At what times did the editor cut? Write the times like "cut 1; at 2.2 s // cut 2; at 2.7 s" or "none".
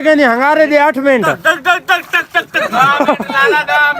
none